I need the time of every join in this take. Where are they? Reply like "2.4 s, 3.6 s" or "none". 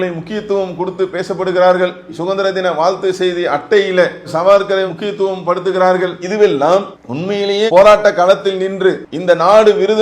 9.1 s